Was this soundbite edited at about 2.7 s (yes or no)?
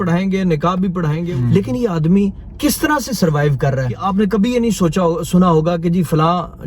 no